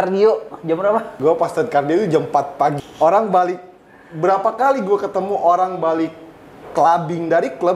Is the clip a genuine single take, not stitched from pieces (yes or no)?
no